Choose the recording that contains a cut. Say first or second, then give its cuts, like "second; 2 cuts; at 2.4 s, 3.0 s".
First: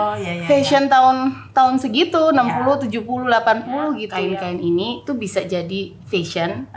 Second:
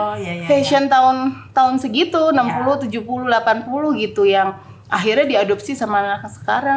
first; 1 cut; at 4.1 s